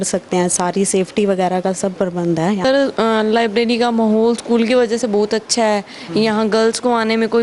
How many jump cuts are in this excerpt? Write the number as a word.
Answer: one